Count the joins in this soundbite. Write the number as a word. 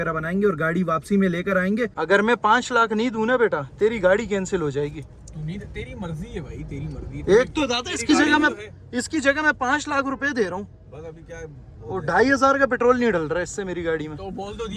one